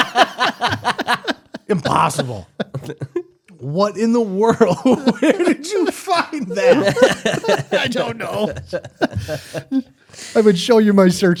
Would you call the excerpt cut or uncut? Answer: uncut